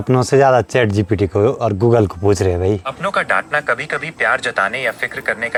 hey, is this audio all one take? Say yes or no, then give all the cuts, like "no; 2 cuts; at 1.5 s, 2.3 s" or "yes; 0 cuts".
yes; 0 cuts